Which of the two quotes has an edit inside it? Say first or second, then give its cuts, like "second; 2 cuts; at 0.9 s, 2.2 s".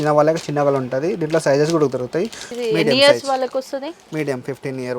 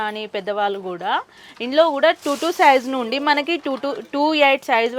first; 1 cut; at 2.4 s